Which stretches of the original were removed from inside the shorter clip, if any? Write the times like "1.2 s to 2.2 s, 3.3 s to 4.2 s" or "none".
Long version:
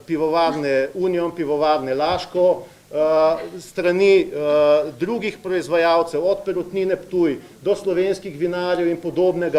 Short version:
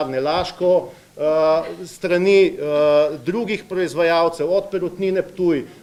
none